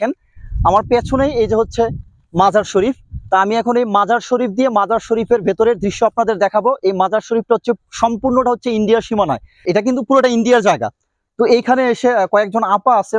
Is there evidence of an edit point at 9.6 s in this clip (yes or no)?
yes